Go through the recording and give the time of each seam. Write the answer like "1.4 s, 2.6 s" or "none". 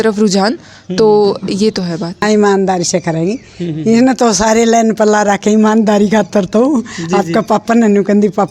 2.2 s